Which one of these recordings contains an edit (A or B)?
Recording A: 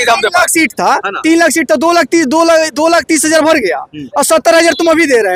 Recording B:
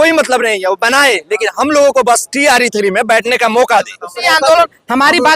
B